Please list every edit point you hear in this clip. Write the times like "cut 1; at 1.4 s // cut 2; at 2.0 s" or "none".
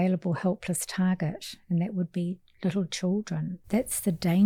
cut 1; at 3.5 s